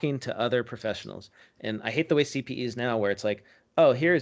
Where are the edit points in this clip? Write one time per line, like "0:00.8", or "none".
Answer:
none